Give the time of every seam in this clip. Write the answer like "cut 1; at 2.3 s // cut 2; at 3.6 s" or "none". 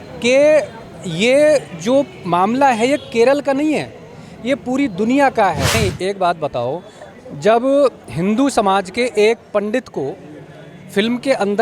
cut 1; at 5.7 s